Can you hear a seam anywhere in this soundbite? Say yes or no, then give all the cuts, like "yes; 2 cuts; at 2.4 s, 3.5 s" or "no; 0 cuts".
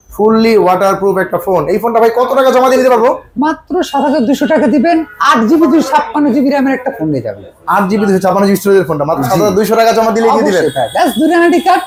no; 0 cuts